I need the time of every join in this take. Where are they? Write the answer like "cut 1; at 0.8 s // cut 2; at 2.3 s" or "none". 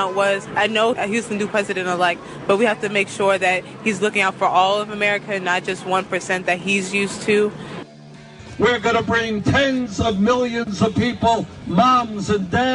cut 1; at 1.0 s // cut 2; at 8.0 s